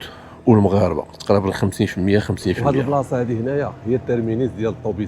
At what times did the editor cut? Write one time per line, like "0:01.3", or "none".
0:02.6